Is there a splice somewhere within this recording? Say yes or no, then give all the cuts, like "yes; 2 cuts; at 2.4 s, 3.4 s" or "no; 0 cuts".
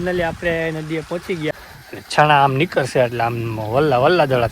yes; 1 cut; at 1.5 s